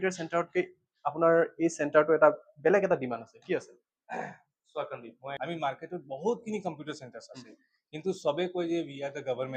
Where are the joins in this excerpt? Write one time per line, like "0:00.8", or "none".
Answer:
0:05.3